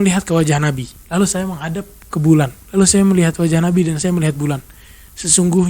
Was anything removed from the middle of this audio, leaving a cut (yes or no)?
yes